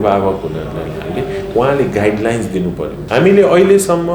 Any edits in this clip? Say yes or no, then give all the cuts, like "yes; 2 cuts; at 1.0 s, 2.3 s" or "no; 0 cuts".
yes; 1 cut; at 3.0 s